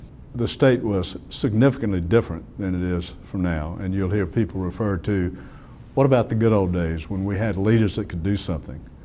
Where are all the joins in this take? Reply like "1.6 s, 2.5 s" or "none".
5.4 s